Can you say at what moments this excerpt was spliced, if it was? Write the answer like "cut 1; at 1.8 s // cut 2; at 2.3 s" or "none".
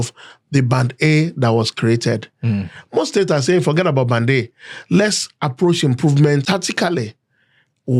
cut 1; at 6.4 s